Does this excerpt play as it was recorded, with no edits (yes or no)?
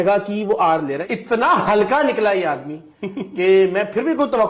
no